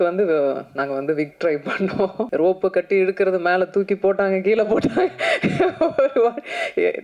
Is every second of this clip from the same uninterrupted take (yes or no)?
no